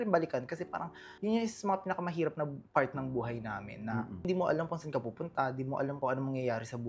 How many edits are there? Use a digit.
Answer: 2